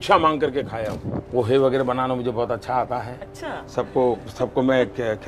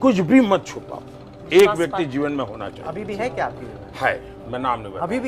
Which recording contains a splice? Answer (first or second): first